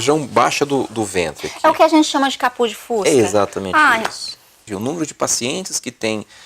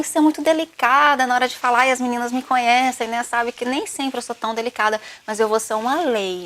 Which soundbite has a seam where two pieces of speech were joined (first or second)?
first